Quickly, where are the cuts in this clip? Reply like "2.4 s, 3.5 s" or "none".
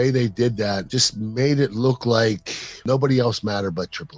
0.9 s, 2.8 s